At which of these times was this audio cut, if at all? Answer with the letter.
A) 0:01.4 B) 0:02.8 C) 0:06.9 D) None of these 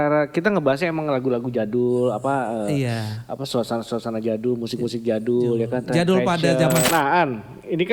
C